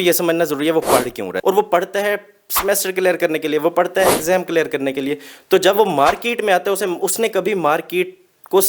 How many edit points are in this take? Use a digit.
1